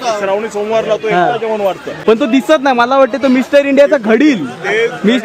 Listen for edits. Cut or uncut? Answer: cut